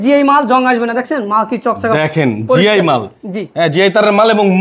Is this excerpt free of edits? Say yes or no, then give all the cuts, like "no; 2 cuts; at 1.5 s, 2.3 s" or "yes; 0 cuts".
yes; 0 cuts